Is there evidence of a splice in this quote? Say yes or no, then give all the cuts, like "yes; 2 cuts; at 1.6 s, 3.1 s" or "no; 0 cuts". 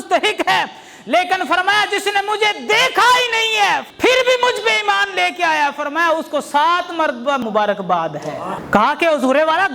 yes; 1 cut; at 8.5 s